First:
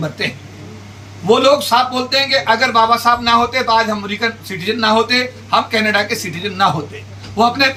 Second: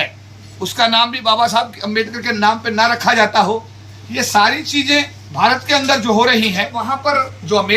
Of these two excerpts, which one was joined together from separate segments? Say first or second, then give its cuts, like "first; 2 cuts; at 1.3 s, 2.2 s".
second; 1 cut; at 6.9 s